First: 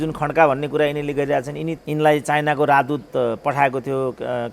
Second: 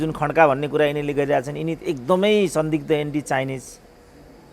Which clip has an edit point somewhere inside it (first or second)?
first